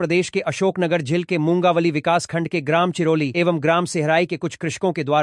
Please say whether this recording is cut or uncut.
uncut